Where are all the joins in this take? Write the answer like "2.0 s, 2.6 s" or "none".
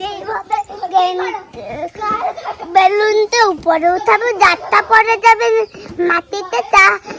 none